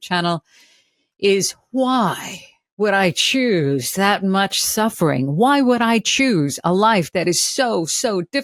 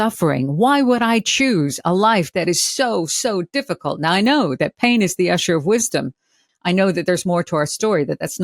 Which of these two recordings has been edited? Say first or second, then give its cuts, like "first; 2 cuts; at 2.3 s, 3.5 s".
second; 1 cut; at 6.4 s